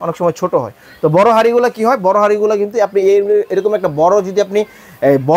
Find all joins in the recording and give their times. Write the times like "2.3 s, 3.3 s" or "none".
none